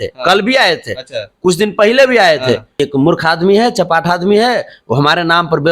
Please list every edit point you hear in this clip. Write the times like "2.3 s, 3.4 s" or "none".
2.8 s